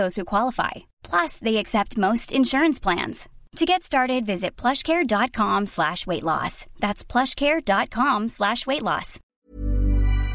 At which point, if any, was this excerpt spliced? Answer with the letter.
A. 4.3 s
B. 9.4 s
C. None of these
B